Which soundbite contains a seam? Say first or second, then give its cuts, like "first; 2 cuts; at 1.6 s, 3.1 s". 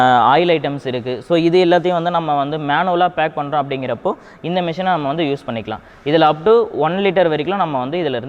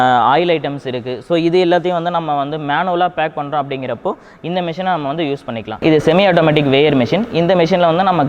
second; 1 cut; at 5.8 s